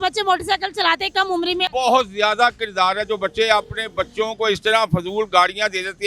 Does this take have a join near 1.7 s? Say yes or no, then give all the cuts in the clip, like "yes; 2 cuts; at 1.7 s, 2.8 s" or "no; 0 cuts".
yes; 1 cut; at 1.7 s